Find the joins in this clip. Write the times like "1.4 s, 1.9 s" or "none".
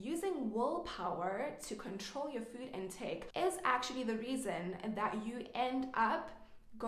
3.3 s